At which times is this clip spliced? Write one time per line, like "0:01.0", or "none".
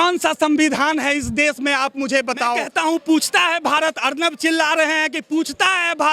0:02.6